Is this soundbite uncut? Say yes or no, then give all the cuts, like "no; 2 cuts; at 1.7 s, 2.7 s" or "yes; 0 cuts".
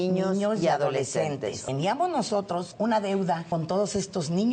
no; 3 cuts; at 1.6 s, 2.7 s, 3.4 s